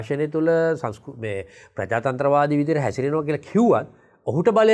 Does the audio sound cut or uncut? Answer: uncut